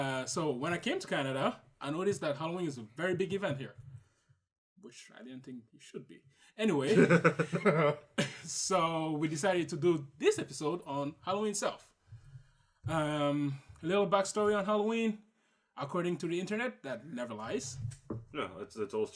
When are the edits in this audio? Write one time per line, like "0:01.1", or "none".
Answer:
0:14.1